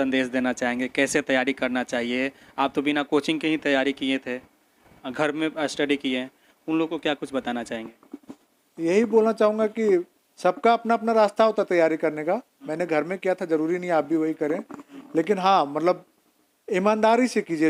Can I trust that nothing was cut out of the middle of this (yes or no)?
yes